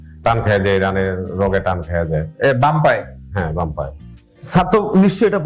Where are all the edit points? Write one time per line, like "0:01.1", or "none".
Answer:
0:04.0

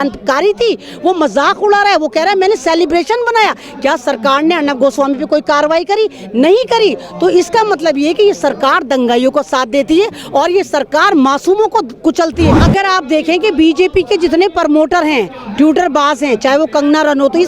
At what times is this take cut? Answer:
0:12.6

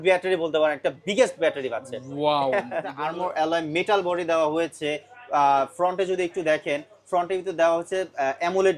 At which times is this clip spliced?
0:03.0

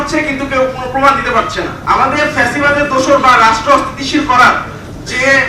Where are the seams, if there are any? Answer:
0:01.8

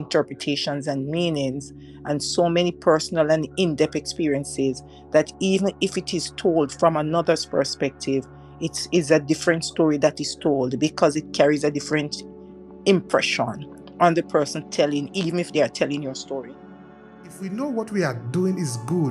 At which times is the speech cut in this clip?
0:16.8

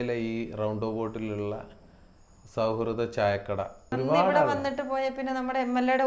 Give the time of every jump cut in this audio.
0:03.8

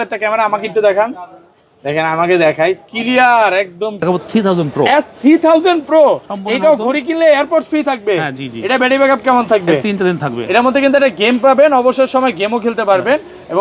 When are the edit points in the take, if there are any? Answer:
0:04.0

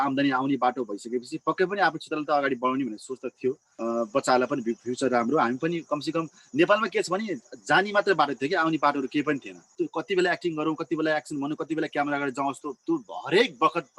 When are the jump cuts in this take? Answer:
0:03.7
0:09.6

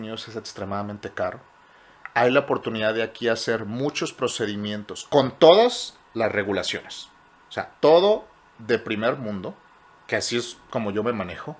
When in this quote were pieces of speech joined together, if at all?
none

